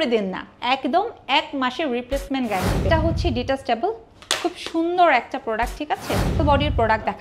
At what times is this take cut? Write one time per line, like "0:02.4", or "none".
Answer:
0:02.9
0:06.4